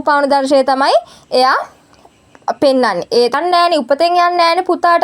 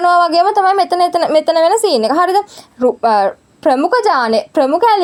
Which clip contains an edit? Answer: first; 1 cut; at 3.3 s

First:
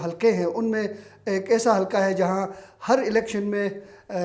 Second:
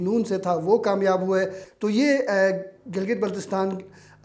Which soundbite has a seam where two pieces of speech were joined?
second; 1 cut; at 1.6 s

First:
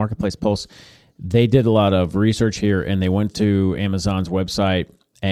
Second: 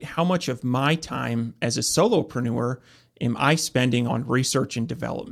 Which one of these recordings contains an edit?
second; 1 cut; at 4.1 s

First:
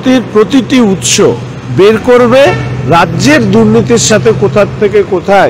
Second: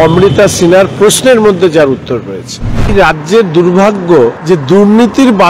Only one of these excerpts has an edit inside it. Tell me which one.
second; 2 cuts; at 2.9 s, 4.4 s

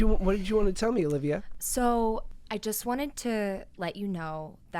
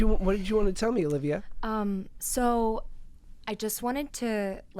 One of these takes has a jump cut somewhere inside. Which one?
first; 2 cuts; at 1.5 s, 2.3 s

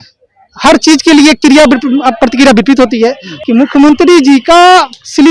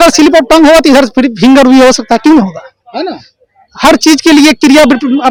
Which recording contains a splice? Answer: first; 1 cut; at 3.3 s

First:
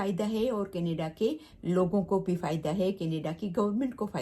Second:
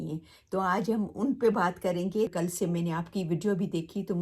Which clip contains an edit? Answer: second; 1 cut; at 2.3 s

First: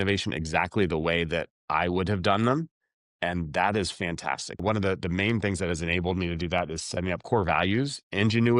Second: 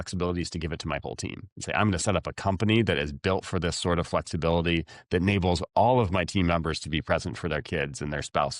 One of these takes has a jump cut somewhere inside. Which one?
first; 1 cut; at 4.6 s

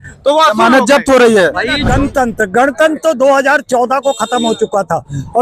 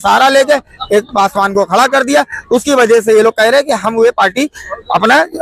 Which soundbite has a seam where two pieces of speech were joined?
first; 1 cut; at 1.8 s

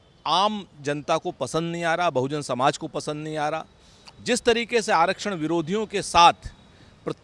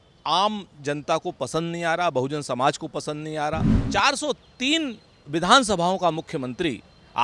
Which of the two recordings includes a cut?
second; 1 cut; at 3.8 s

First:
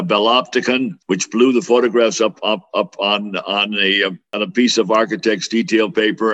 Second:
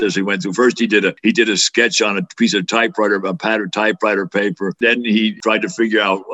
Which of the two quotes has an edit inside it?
second; 2 cuts; at 1.2 s, 4.8 s

